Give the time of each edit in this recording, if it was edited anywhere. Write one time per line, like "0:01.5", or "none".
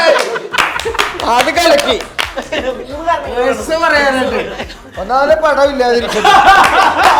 none

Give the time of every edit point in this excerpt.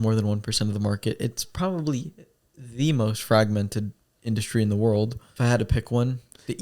0:05.2

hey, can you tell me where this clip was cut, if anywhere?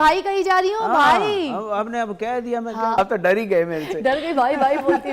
0:02.9

